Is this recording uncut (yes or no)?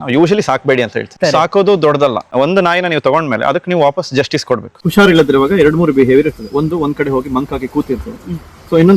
no